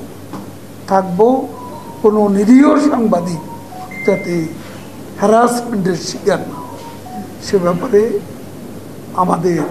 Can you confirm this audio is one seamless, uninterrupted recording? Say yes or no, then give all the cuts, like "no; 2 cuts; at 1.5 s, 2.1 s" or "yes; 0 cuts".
yes; 0 cuts